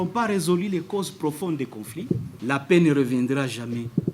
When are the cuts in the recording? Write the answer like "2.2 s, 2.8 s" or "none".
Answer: 2.3 s